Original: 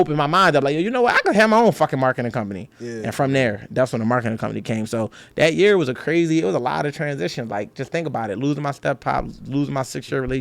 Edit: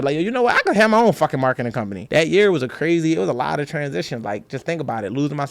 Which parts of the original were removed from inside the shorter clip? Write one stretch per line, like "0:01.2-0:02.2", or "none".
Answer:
0:02.6-0:05.2